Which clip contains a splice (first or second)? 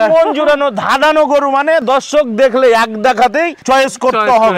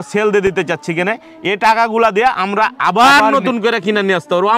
first